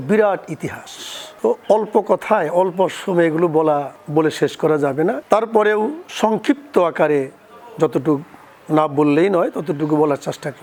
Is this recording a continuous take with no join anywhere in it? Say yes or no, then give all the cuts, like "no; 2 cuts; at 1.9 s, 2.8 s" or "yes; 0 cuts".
yes; 0 cuts